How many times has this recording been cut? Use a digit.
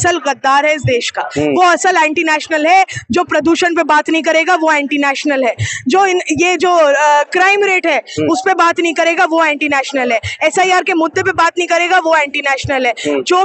0